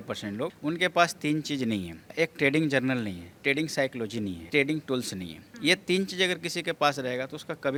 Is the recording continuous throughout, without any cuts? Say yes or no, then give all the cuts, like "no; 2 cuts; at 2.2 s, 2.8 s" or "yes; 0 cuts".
yes; 0 cuts